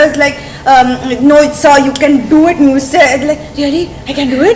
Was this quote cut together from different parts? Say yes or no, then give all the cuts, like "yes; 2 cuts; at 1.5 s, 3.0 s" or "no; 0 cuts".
no; 0 cuts